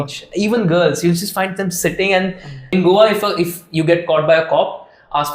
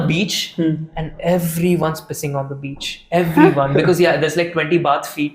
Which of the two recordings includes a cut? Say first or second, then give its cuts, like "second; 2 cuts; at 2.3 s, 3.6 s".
first; 1 cut; at 2.6 s